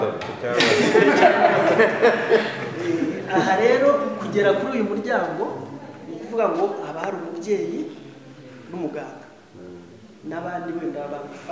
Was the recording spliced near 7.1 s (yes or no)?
no